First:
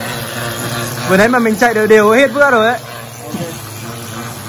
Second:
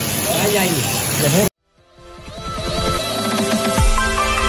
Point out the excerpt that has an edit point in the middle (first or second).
second